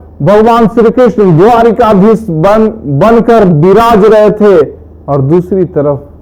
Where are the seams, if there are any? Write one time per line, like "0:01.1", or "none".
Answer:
none